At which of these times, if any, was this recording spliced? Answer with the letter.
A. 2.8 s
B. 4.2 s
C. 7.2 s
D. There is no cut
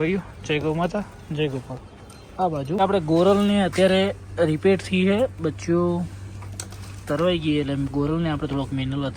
A